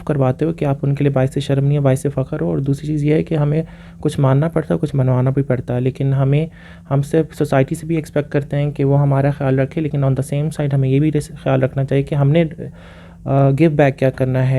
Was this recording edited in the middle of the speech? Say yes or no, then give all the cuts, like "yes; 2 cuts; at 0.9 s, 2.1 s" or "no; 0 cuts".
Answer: no; 0 cuts